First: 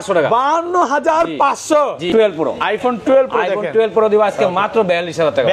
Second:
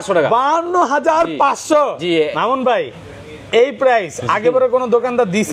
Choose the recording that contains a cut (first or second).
first